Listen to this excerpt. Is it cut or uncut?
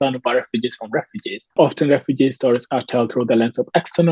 uncut